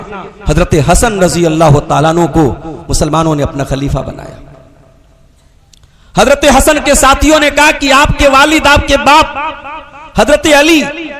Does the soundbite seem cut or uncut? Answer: uncut